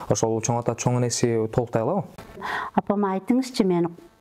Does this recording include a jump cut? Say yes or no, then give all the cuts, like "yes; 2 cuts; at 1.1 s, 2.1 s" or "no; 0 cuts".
yes; 1 cut; at 2.5 s